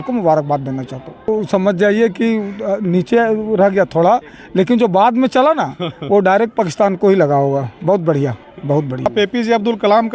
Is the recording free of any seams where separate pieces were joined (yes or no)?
no